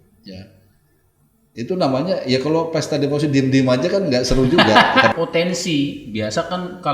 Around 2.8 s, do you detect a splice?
no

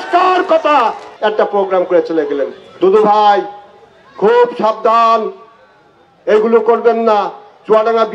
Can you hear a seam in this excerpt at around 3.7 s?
no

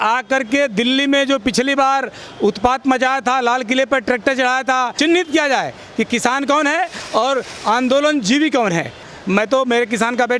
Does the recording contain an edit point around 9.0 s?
yes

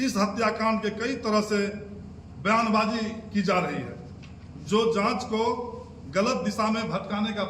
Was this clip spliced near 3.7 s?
no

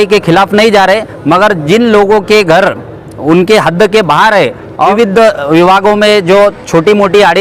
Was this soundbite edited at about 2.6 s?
no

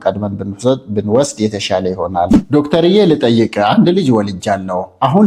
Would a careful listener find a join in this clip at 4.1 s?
no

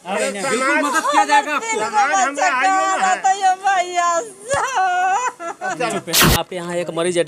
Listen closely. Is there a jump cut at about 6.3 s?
yes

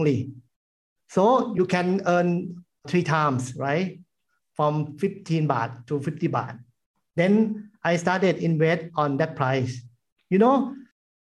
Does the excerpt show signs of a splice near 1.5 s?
yes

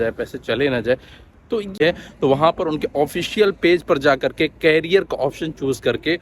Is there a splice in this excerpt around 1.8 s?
yes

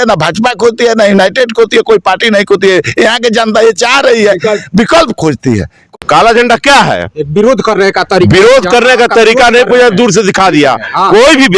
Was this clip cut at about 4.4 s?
no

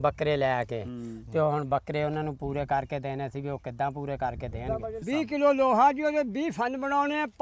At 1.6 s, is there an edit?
no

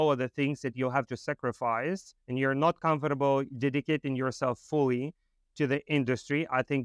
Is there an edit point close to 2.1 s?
yes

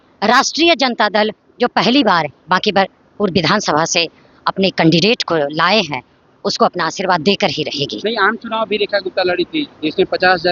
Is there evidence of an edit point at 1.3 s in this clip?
no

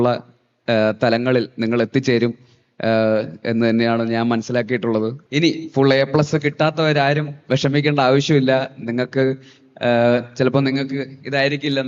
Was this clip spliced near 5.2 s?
yes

